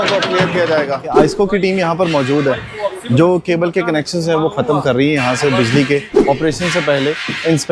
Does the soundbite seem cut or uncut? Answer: cut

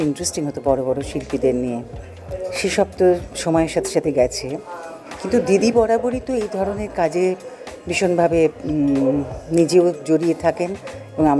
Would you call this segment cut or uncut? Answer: uncut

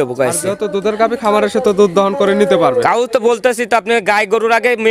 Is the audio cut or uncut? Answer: uncut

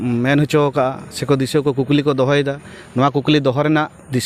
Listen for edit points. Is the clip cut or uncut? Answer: uncut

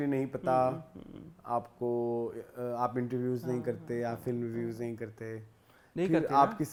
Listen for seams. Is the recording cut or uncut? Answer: uncut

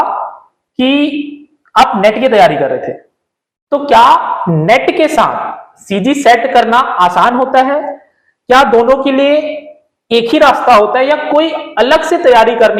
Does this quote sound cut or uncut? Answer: uncut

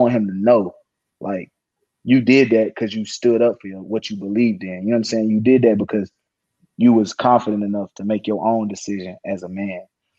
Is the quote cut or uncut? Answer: uncut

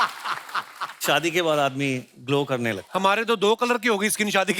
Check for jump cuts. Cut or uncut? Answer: cut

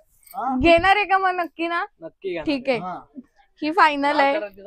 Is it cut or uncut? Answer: uncut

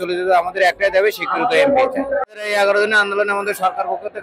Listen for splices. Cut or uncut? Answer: uncut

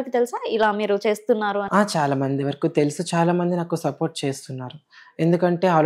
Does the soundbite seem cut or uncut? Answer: uncut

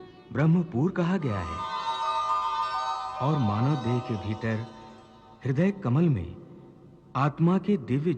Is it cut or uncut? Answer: cut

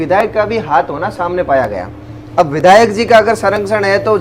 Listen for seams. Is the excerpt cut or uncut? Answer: uncut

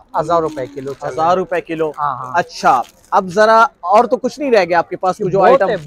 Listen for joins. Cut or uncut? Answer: uncut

